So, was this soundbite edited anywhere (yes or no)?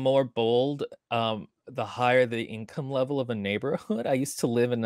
no